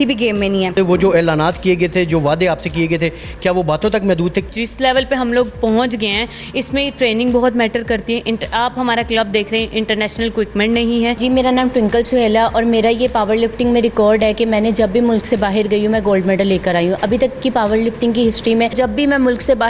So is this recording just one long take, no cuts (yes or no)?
no